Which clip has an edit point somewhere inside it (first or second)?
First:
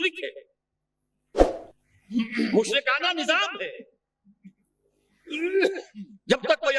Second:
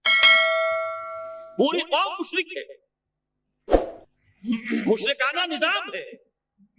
second